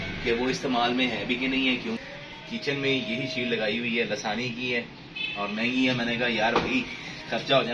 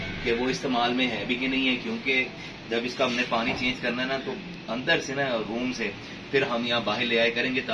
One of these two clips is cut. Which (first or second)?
first